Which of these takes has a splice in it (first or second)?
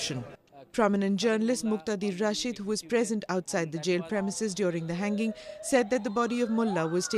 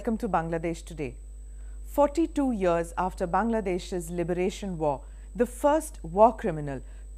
first